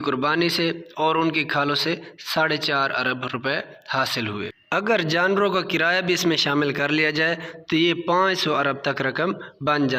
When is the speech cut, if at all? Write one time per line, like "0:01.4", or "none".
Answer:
none